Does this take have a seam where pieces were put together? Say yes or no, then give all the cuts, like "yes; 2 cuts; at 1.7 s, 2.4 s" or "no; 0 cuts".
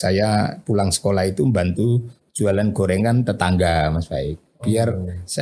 no; 0 cuts